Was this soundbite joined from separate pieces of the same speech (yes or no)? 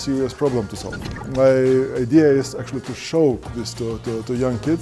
yes